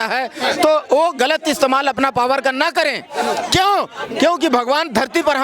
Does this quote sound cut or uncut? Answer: uncut